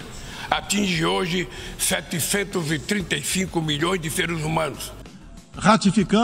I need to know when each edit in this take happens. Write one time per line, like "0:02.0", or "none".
0:05.3